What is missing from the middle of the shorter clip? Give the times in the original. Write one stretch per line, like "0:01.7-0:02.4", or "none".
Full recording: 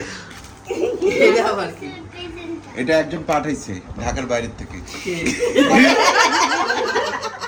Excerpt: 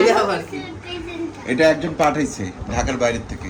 none